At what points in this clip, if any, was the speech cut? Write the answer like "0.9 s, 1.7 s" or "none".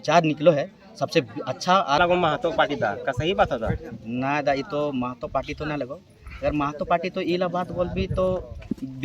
2.0 s